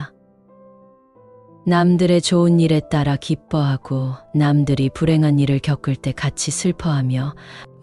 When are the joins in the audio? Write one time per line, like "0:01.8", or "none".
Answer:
none